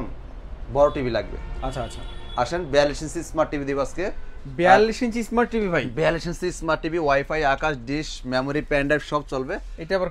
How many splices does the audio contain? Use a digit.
0